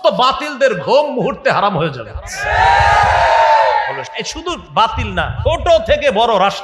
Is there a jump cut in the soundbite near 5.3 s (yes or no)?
yes